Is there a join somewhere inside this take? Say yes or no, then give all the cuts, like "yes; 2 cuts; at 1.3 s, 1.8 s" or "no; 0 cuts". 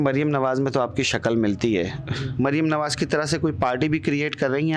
no; 0 cuts